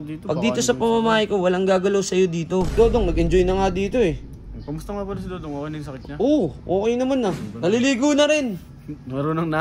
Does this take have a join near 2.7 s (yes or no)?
yes